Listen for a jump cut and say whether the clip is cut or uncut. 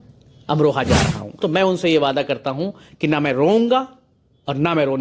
cut